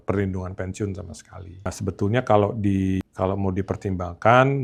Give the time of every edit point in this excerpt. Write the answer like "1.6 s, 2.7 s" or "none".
none